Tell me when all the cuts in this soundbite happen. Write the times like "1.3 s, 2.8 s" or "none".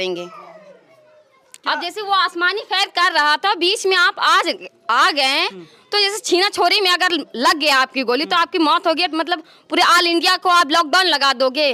none